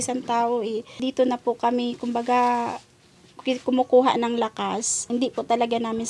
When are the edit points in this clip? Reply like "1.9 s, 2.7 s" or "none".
1.0 s, 5.1 s

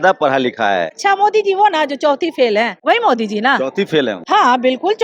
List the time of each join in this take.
1.0 s, 2.8 s, 4.2 s

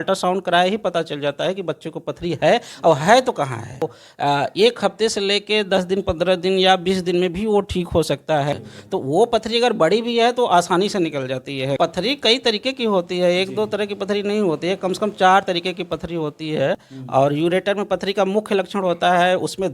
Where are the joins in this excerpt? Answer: 4.0 s, 8.6 s, 11.8 s, 16.9 s

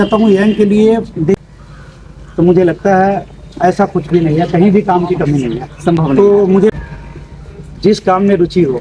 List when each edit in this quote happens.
1.4 s, 6.7 s

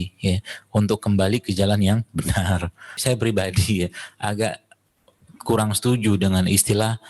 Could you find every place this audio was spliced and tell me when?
3.0 s

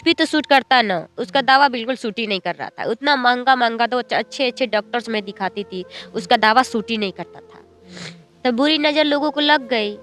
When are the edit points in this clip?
none

